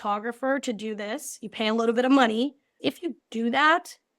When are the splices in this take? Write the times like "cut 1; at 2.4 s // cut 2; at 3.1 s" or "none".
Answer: cut 1; at 2.8 s